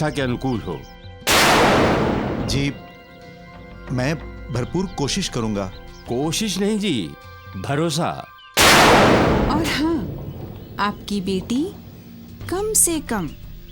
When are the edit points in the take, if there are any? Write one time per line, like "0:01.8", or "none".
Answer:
0:09.4